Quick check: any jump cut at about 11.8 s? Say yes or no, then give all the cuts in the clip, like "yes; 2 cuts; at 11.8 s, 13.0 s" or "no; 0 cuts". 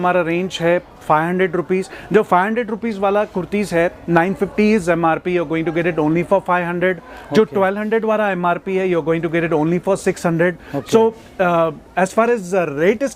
no; 0 cuts